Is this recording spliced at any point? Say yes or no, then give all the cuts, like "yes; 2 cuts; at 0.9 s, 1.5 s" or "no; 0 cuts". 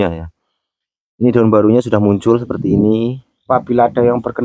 yes; 1 cut; at 3.3 s